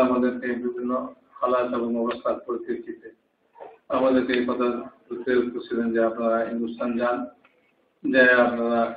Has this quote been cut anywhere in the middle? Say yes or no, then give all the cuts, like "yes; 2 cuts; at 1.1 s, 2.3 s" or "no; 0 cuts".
no; 0 cuts